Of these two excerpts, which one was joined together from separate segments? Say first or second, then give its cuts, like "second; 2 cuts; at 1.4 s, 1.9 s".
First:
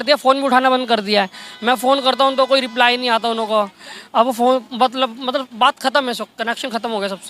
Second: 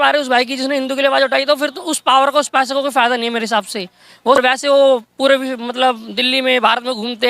second; 1 cut; at 4.4 s